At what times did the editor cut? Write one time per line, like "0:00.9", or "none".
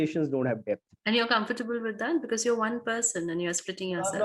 0:00.9